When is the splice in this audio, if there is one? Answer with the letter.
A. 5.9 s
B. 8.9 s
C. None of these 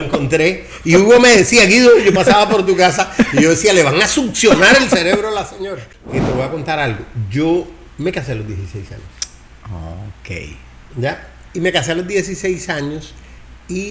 A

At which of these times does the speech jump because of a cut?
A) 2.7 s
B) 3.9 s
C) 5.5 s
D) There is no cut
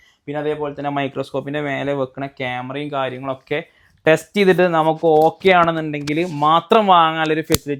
D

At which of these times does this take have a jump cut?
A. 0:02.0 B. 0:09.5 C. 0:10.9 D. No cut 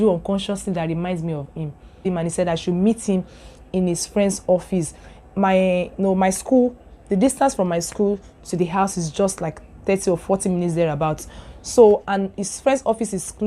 A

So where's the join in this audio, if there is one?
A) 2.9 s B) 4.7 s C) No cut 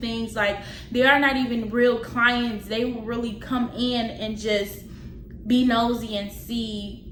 C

